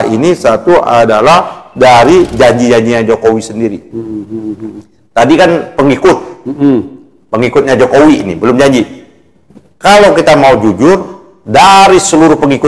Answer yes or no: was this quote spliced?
no